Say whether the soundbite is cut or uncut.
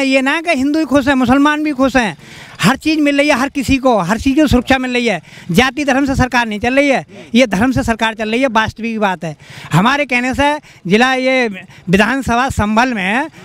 uncut